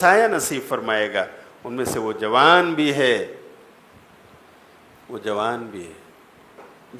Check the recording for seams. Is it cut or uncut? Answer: uncut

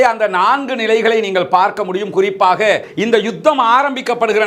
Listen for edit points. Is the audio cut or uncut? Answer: cut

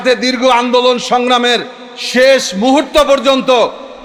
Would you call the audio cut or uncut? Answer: uncut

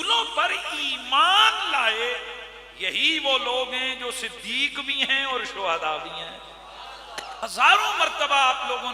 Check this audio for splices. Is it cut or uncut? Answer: cut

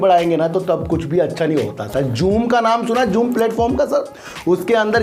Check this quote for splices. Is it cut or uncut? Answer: uncut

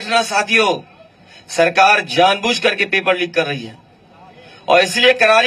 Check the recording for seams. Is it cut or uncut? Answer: uncut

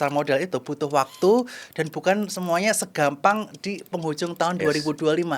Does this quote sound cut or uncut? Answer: uncut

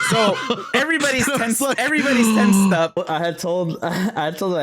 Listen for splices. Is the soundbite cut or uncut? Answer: cut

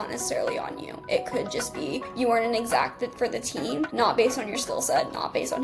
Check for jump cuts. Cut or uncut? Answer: uncut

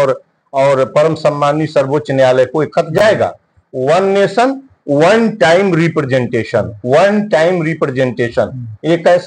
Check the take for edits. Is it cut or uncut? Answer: uncut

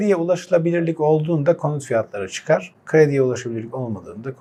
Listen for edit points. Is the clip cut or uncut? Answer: uncut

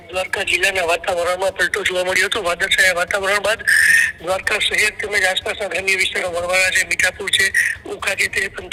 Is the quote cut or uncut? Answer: uncut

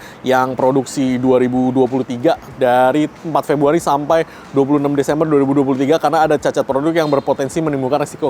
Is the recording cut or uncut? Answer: uncut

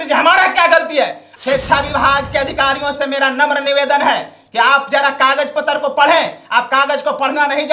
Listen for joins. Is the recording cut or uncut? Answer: cut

